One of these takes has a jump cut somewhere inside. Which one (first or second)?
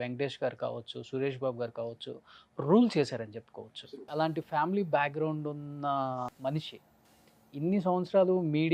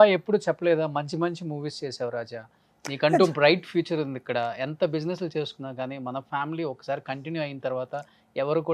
first